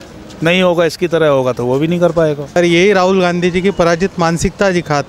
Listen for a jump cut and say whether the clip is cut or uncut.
cut